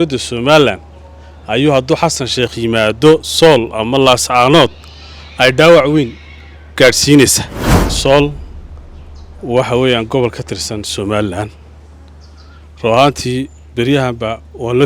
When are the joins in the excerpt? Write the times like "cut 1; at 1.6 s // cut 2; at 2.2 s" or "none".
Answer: cut 1; at 7.9 s

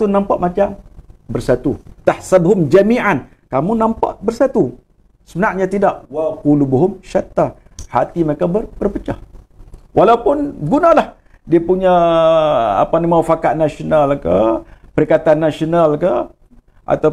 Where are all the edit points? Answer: none

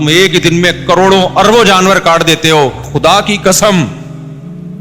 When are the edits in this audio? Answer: cut 1; at 2.9 s

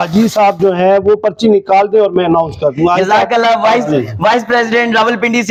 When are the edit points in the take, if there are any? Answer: none

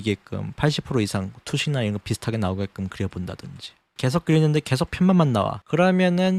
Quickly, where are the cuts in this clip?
none

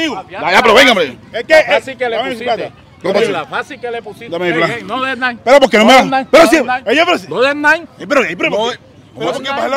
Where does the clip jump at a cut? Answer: none

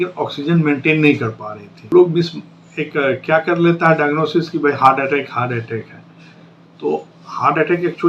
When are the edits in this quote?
cut 1; at 1.9 s

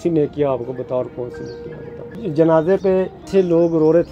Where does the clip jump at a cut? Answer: cut 1; at 2.2 s // cut 2; at 3.2 s

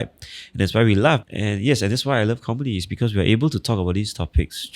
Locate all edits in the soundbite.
cut 1; at 1.3 s

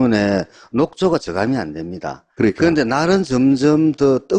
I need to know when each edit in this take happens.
cut 1; at 2.3 s

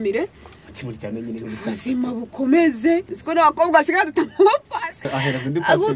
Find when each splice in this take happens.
cut 1; at 3.2 s // cut 2; at 5.1 s

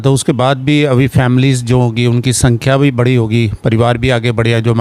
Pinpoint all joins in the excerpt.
none

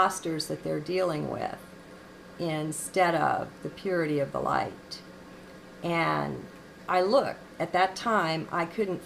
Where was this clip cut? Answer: cut 1; at 2.5 s

